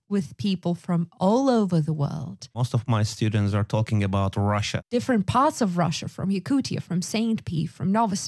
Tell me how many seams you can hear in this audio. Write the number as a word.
two